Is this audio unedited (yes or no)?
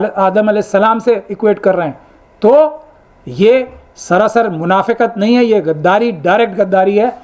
yes